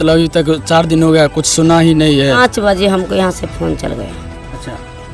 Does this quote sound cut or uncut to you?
cut